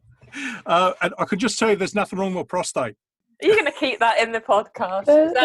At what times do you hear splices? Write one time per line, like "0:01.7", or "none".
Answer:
0:03.2